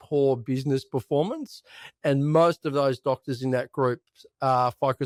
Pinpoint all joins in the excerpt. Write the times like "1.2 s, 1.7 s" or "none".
none